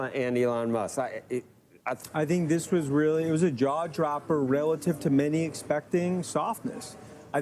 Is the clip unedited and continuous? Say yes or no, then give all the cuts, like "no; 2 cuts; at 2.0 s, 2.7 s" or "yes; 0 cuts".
no; 1 cut; at 2.0 s